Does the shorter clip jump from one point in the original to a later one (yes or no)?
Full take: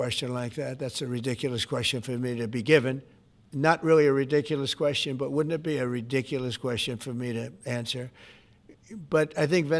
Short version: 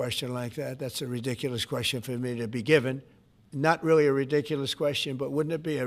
no